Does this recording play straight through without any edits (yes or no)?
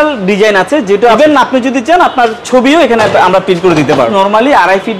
no